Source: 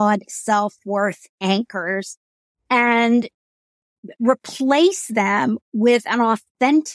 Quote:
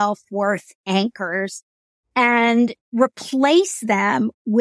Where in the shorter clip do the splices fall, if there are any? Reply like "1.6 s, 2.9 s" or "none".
2.8 s